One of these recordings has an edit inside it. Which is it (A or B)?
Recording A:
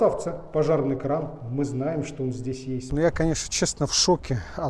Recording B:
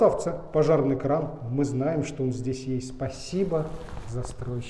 A